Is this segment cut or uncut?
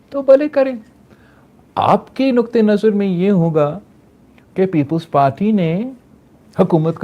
uncut